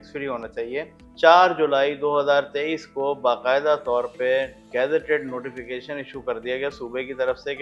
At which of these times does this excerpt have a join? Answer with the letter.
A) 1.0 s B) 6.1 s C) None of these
A